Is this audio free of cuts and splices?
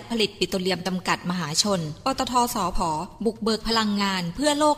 yes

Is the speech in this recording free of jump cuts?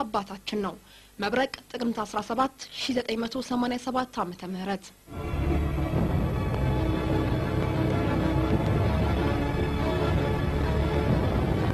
yes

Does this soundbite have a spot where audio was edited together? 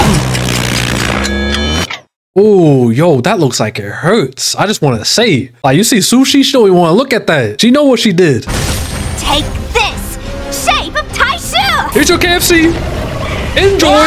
no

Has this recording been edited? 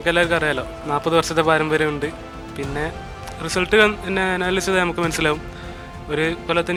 no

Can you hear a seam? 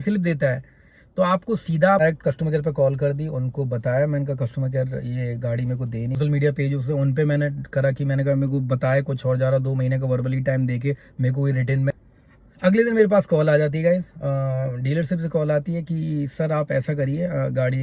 yes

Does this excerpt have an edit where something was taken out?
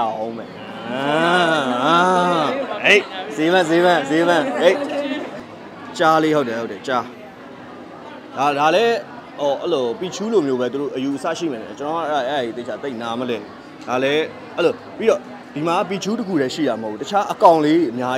no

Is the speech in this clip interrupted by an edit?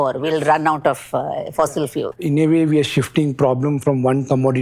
yes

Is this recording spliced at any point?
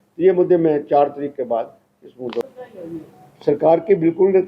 yes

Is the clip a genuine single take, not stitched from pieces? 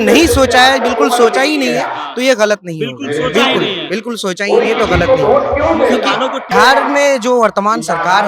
no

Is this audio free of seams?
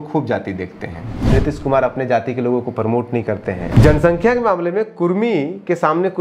no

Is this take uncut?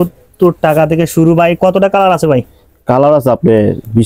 yes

